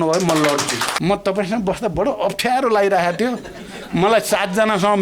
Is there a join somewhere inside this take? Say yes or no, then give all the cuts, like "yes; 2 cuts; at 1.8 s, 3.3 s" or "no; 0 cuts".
yes; 1 cut; at 0.9 s